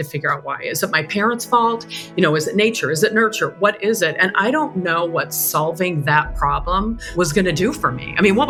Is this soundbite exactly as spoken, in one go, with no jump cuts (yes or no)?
yes